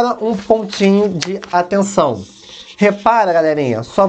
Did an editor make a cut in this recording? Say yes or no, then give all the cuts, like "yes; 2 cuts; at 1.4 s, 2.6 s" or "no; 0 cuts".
no; 0 cuts